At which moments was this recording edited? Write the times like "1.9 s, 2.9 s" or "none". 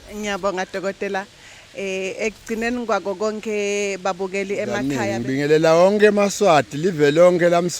4.8 s